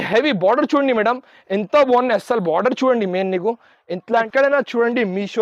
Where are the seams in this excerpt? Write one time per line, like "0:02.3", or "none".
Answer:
0:04.3